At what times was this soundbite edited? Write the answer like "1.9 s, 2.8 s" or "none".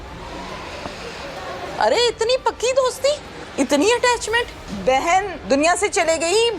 1.7 s, 3.4 s, 4.6 s, 5.4 s

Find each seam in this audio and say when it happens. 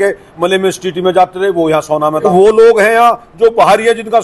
2.2 s

